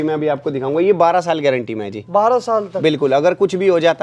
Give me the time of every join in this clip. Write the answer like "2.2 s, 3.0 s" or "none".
none